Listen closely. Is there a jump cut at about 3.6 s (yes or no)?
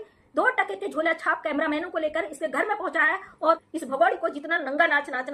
yes